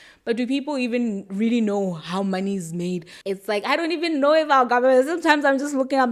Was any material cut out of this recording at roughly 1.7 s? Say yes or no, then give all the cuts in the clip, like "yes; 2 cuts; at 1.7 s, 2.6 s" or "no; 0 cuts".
no; 1 cut; at 3.1 s